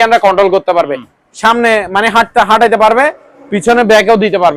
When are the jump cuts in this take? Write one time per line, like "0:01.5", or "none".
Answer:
none